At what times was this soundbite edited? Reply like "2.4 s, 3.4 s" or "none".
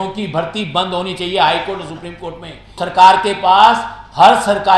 2.8 s

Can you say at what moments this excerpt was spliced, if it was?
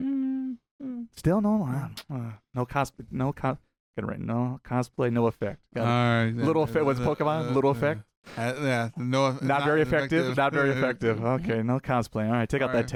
none

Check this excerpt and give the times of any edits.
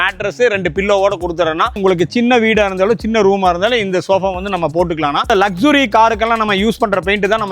1.8 s, 5.3 s

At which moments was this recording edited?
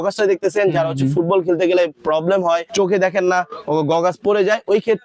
2.7 s

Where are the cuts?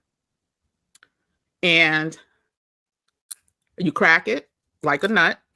none

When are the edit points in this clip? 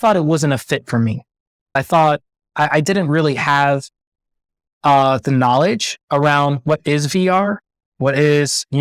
1.8 s

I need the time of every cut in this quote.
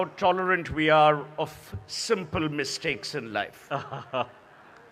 none

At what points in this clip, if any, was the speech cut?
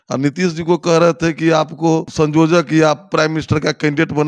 2.1 s

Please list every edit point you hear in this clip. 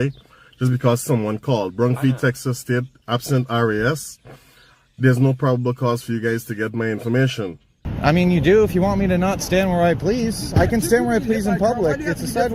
7.8 s

